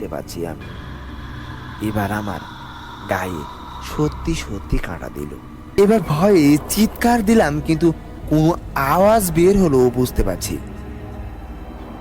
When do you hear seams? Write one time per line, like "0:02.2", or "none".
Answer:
0:05.8